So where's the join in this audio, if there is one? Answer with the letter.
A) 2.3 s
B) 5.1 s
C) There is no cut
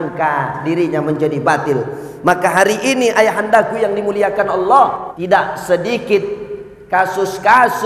B